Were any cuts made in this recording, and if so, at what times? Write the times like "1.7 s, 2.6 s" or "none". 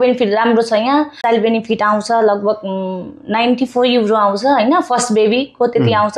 1.2 s